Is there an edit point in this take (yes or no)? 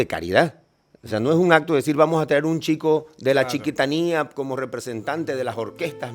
no